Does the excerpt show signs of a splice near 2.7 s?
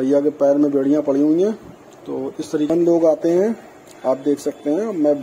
yes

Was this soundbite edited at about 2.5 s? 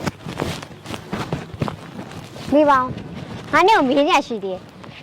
yes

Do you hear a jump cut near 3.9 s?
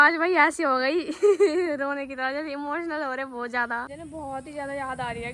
yes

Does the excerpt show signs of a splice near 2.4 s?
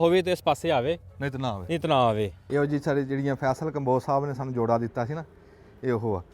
yes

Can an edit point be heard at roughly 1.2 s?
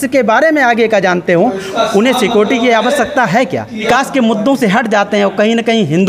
no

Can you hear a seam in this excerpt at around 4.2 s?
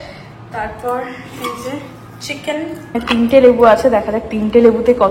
no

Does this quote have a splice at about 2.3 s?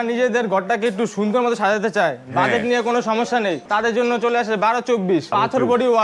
no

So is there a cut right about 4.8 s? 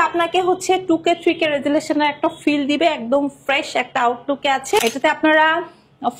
yes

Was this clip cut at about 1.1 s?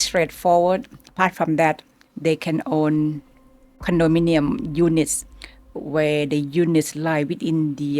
yes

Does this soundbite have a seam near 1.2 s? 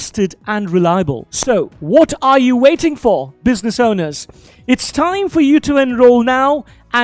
yes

